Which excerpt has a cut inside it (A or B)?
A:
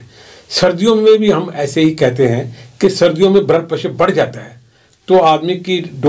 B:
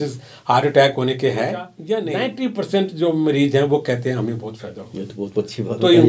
B